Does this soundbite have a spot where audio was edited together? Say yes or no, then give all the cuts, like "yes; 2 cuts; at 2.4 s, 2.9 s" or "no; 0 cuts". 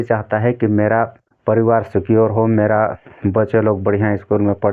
yes; 1 cut; at 1.2 s